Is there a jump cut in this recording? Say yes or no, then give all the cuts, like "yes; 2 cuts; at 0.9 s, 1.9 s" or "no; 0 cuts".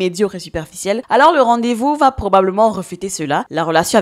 no; 0 cuts